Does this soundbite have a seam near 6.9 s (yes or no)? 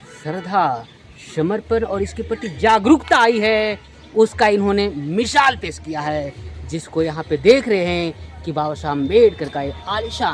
no